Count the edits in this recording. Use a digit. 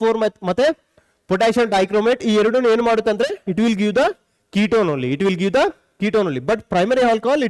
0